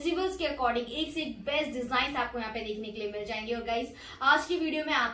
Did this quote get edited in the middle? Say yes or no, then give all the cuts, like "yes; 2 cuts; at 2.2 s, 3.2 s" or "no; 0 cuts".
no; 0 cuts